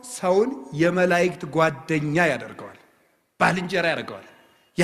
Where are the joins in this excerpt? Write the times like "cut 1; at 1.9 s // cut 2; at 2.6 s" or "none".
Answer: none

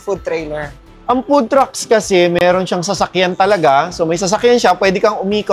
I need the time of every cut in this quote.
none

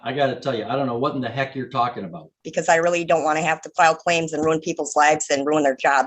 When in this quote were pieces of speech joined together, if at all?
cut 1; at 2.4 s

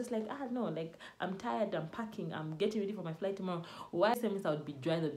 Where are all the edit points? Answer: cut 1; at 4.1 s

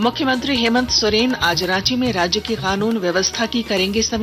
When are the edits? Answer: none

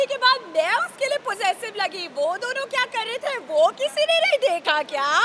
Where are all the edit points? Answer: none

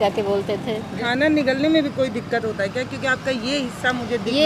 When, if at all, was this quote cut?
cut 1; at 0.9 s

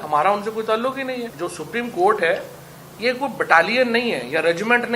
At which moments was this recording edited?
cut 1; at 1.3 s

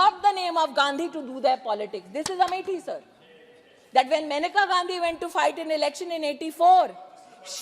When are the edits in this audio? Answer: none

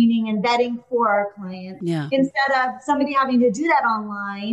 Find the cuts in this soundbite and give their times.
cut 1; at 1.8 s

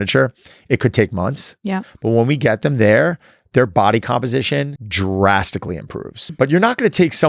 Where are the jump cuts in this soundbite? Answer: cut 1; at 4.8 s // cut 2; at 6.3 s

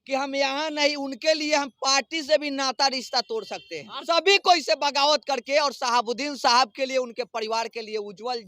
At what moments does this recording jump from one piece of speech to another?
cut 1; at 3.9 s

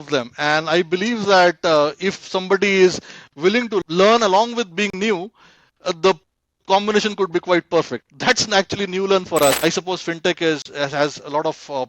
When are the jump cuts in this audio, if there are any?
cut 1; at 3.8 s // cut 2; at 9.6 s

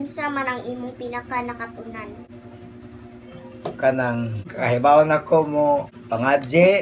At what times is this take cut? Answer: none

